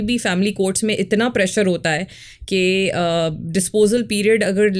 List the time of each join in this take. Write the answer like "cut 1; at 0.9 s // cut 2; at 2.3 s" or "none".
none